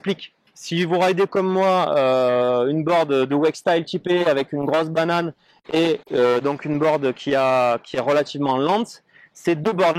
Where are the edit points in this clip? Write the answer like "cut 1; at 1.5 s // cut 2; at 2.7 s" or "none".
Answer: none